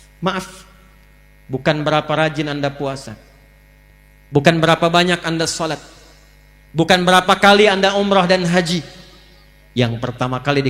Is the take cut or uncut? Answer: uncut